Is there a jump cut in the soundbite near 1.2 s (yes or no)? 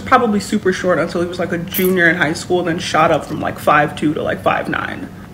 yes